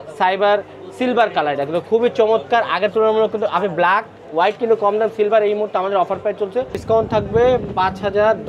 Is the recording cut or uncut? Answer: cut